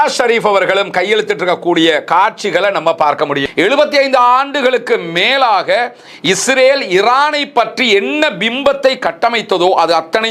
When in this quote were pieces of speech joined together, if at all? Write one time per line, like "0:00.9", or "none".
0:03.4

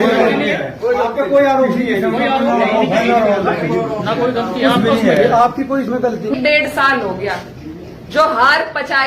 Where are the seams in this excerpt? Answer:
0:06.3

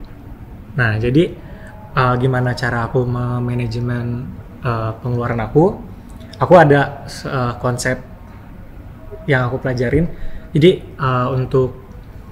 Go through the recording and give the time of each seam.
none

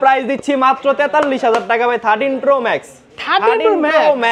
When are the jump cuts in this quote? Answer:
none

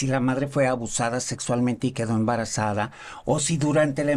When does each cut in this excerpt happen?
none

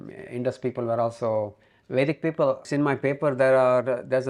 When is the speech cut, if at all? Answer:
0:02.7

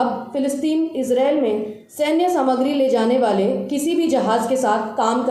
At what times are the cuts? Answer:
none

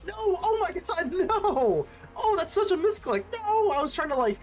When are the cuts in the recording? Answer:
none

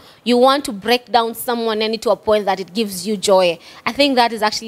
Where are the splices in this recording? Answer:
none

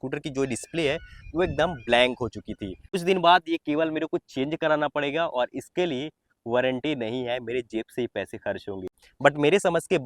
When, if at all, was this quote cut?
0:03.0
0:09.0

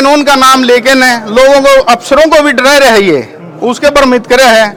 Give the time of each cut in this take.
none

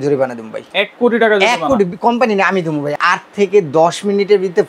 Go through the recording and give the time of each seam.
0:03.0

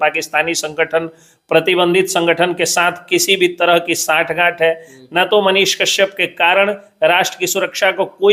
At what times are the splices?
none

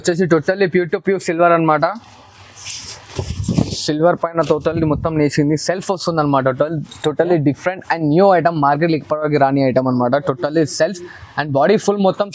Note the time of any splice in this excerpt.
none

